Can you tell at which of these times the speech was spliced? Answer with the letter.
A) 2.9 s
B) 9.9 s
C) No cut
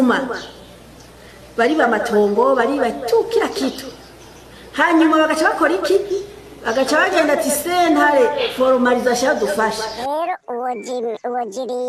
B